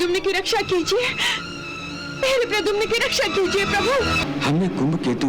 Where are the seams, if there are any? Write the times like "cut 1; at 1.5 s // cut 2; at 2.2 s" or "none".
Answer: cut 1; at 4.2 s